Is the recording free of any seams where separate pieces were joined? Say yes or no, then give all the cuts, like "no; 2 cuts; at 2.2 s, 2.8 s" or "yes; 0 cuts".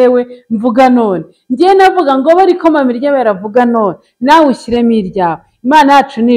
yes; 0 cuts